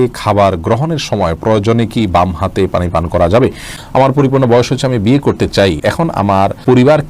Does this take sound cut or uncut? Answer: cut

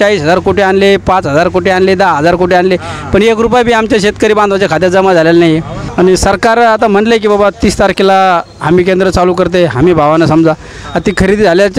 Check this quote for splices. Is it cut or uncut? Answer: cut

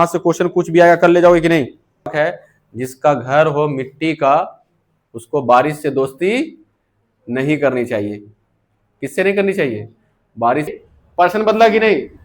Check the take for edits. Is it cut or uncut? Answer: cut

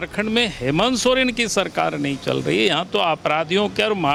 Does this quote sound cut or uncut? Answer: uncut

